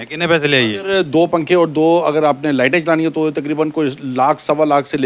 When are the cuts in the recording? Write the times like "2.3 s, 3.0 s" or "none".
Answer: none